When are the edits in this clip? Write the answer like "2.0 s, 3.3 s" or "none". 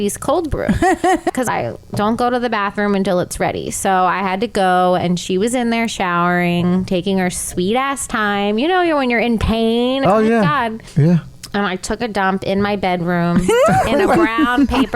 1.3 s, 10.0 s, 10.8 s